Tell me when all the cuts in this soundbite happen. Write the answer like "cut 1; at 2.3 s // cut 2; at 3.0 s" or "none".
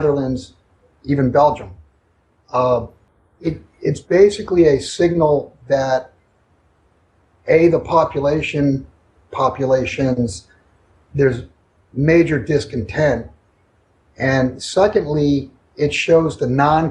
cut 1; at 9.2 s